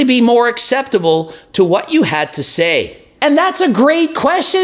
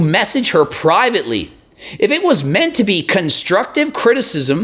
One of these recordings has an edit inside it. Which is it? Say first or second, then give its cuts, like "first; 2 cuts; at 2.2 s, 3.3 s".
first; 1 cut; at 3.0 s